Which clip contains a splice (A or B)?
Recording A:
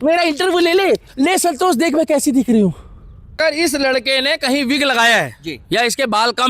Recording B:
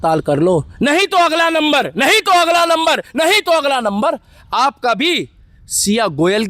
A